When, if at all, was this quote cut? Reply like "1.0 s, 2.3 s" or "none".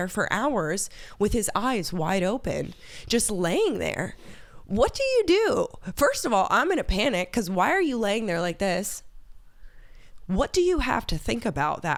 none